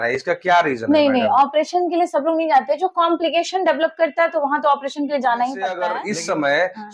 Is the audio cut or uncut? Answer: cut